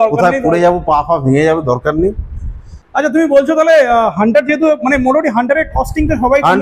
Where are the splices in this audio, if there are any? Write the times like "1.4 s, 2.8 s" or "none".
2.8 s